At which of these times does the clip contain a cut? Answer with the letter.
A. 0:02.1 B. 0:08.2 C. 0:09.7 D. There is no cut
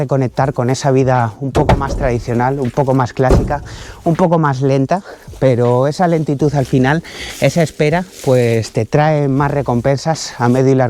D